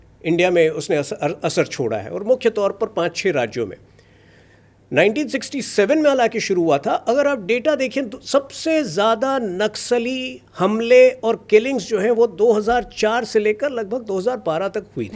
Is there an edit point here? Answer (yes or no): no